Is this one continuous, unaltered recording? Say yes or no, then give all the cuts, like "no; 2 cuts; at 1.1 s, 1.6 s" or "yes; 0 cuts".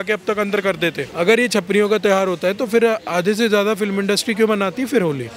no; 1 cut; at 1.0 s